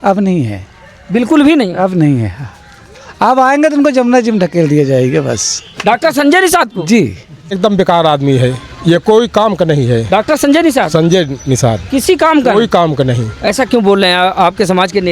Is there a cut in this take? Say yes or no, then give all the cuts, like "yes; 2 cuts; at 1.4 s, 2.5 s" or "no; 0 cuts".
yes; 1 cut; at 7.6 s